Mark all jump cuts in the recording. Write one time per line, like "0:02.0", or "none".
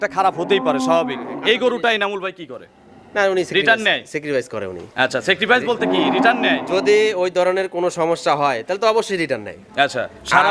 none